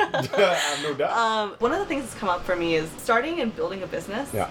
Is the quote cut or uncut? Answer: cut